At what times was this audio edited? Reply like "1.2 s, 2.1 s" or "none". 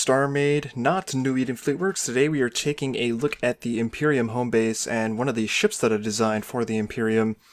none